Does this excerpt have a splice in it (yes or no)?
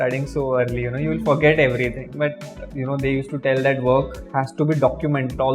yes